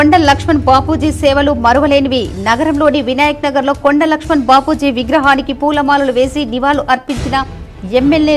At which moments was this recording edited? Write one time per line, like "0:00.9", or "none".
none

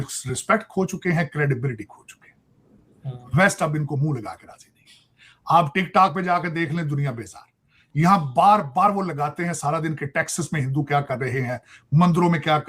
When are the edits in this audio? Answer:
none

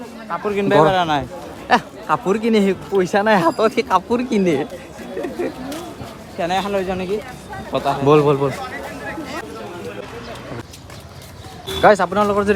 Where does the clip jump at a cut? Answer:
none

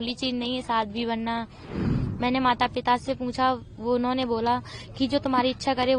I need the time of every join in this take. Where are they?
0:01.7

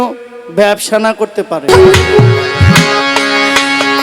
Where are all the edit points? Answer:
0:01.7

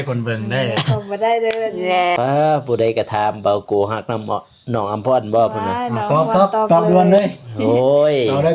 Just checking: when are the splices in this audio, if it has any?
0:02.2

